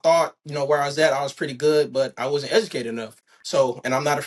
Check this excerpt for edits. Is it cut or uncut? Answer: uncut